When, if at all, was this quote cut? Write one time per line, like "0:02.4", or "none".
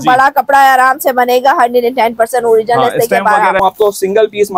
0:03.6